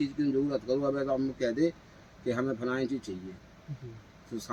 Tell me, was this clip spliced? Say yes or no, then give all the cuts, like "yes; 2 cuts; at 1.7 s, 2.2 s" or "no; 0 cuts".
no; 0 cuts